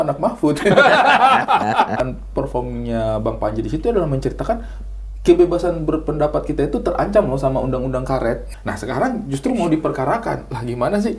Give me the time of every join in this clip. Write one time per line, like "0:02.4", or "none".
0:02.0
0:08.5